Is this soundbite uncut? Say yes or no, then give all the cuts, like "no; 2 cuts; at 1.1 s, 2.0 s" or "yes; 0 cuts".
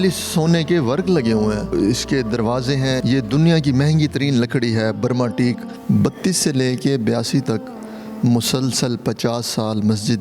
no; 3 cuts; at 1.7 s, 3.0 s, 5.7 s